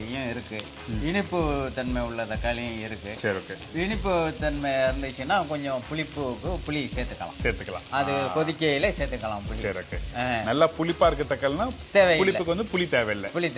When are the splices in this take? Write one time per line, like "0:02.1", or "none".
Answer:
0:11.7